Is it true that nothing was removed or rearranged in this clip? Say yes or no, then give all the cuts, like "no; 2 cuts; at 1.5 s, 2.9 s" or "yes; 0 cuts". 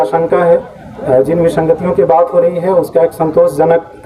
yes; 0 cuts